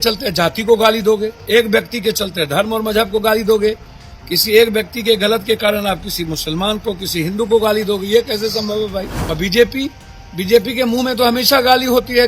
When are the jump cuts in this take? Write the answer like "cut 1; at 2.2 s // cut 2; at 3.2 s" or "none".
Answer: cut 1; at 9.2 s